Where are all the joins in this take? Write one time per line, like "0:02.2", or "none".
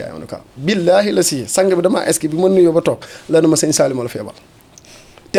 none